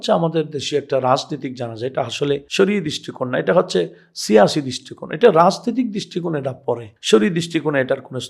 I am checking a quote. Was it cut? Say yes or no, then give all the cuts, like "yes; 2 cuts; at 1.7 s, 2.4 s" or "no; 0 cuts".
no; 0 cuts